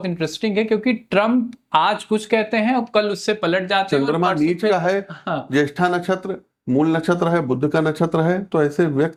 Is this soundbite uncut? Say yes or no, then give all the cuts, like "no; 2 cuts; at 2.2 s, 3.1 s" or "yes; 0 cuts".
yes; 0 cuts